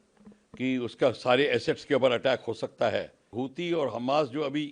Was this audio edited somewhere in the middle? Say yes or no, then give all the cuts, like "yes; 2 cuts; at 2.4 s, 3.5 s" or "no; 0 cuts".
yes; 1 cut; at 3.3 s